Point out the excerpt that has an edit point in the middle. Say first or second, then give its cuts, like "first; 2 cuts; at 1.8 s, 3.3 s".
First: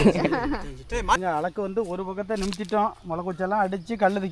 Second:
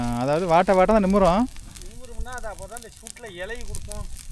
first; 1 cut; at 1.2 s